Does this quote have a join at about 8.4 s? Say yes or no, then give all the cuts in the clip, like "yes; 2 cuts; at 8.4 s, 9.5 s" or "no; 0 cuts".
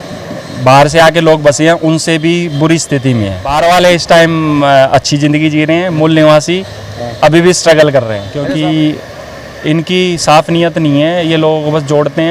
yes; 2 cuts; at 3.4 s, 8.4 s